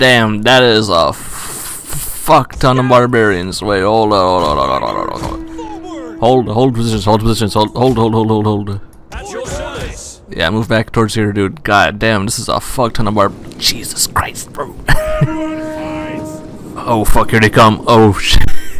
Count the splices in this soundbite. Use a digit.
0